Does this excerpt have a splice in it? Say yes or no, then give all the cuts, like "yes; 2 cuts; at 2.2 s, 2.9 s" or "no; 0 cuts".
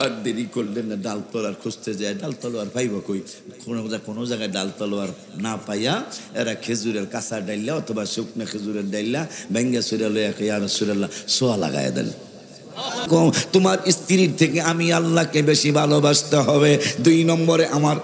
yes; 1 cut; at 13.1 s